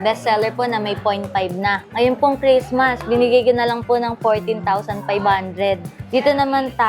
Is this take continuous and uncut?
no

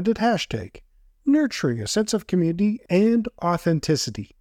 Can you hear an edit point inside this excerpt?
yes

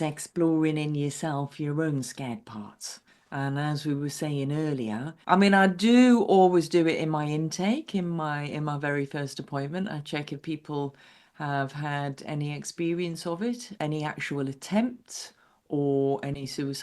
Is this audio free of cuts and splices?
no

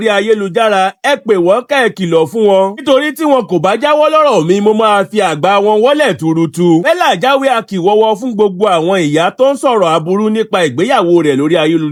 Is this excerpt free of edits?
yes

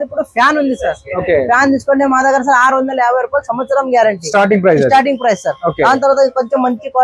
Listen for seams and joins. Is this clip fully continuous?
yes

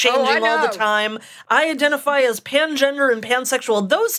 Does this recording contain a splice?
yes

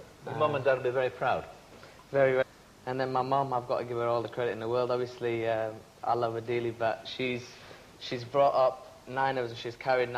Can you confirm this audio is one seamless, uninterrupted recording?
yes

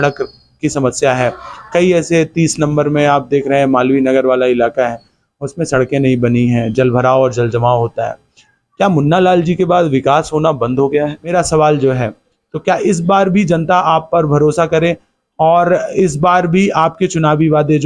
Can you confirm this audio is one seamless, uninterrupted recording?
no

